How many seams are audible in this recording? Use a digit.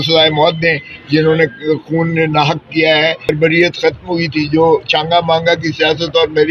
1